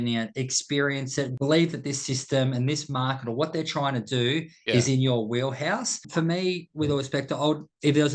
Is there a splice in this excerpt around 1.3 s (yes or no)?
yes